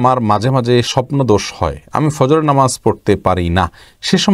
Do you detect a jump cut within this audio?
no; 0 cuts

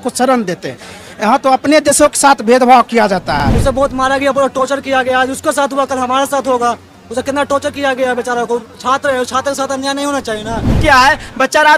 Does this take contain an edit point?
yes; 2 cuts; at 3.5 s, 10.8 s

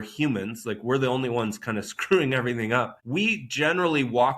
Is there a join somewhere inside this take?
yes; 1 cut; at 3.0 s

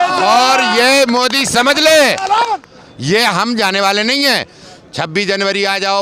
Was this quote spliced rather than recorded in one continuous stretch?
yes; 1 cut; at 2.6 s

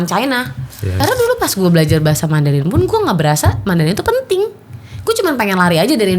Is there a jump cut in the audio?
yes; 1 cut; at 1.1 s

